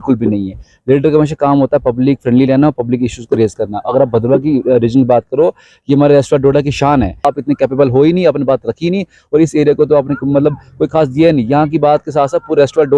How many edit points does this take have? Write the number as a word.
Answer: one